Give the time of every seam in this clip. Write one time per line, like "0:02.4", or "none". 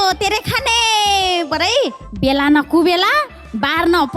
0:02.0